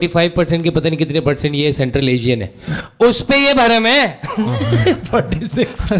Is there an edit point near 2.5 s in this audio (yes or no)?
no